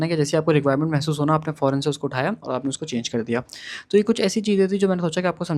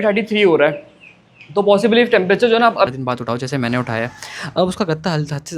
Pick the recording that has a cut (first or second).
second